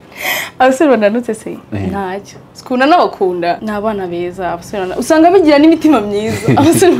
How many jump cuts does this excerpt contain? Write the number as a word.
one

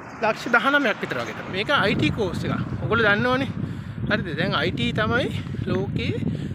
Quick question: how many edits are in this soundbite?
one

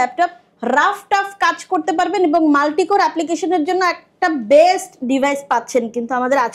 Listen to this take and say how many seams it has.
zero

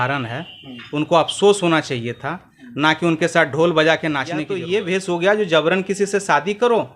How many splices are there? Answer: one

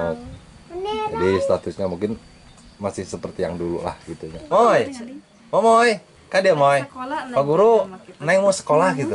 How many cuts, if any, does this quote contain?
one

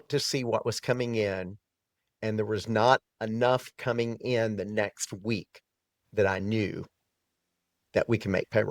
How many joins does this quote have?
one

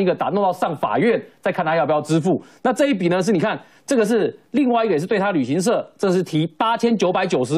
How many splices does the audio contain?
zero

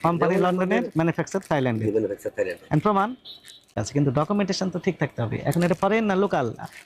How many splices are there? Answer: one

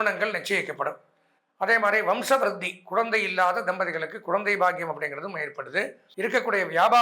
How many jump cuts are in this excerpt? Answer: one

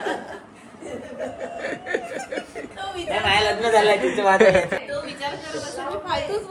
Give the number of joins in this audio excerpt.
two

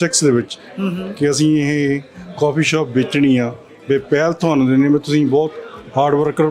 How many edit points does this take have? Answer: zero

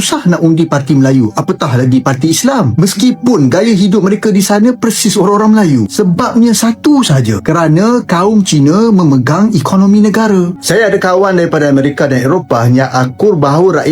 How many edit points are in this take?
one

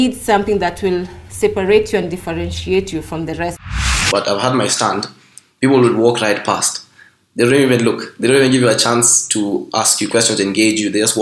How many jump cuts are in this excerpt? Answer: one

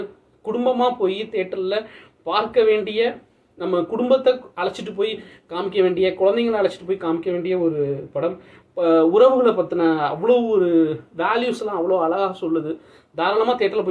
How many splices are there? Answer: zero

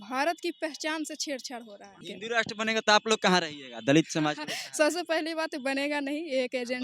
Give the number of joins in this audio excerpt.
one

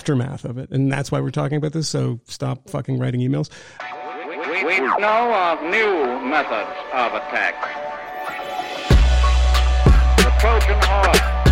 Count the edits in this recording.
one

